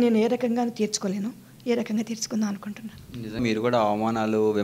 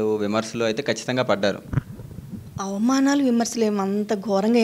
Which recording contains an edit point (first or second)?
first